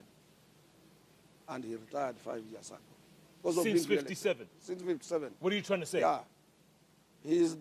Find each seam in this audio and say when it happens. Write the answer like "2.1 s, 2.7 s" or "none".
1.3 s